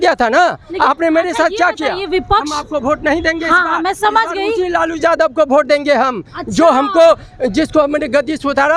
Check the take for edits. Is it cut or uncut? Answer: uncut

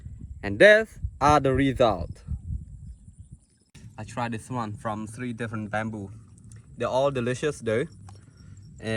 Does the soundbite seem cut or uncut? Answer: cut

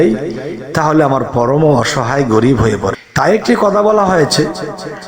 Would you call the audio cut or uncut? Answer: cut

